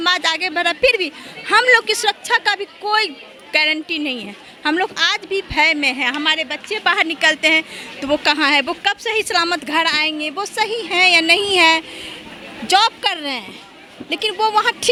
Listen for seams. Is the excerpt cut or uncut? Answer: uncut